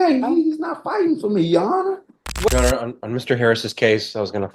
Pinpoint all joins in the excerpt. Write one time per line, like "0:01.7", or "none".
0:02.5

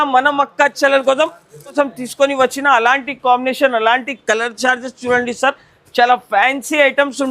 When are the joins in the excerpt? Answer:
0:01.7

